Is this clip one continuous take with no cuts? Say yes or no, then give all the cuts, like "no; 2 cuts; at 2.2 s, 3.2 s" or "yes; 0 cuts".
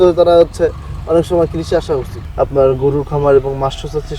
no; 1 cut; at 2.2 s